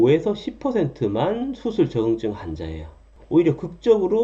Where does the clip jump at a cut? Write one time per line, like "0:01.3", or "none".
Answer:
0:03.0